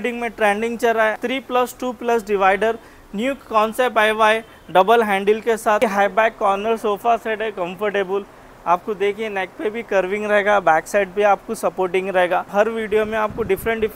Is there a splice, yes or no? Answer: yes